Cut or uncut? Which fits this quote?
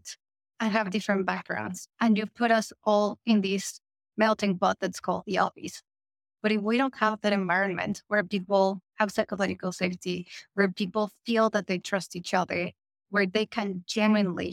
uncut